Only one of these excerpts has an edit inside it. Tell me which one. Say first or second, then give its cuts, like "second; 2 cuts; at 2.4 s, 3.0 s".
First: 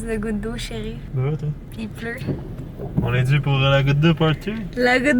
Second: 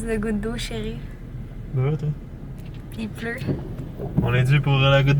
first; 2 cuts; at 1.0 s, 1.7 s